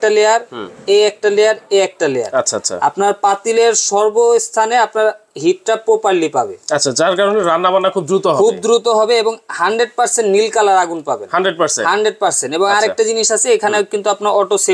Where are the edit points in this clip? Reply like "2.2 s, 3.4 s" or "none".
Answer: none